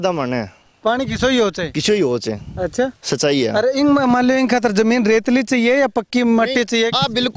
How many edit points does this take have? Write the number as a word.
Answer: zero